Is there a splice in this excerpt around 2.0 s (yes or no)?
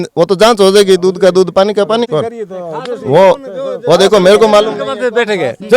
yes